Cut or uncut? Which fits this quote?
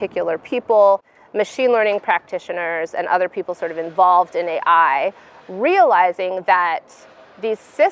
cut